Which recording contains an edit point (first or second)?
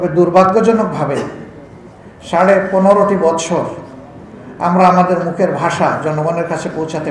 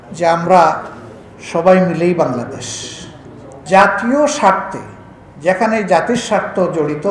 second